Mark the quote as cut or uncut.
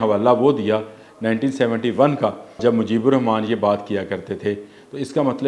cut